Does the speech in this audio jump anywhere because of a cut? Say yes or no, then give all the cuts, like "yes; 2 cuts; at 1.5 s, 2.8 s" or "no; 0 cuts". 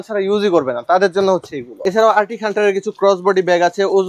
yes; 1 cut; at 1.8 s